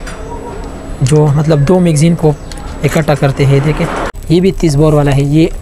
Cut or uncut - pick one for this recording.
cut